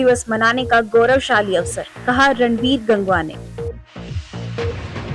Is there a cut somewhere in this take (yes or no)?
yes